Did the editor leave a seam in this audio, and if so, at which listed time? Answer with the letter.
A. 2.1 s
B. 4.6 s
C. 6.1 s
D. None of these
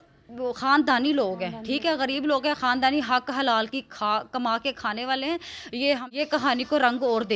C